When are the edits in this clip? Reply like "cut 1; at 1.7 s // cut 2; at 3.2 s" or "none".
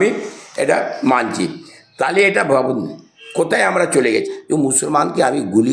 cut 1; at 4.2 s